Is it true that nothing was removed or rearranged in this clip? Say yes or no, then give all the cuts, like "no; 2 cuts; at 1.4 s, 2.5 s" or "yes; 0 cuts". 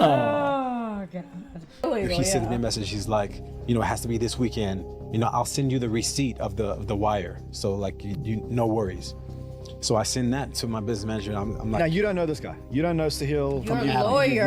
no; 1 cut; at 1.8 s